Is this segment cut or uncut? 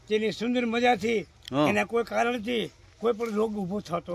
uncut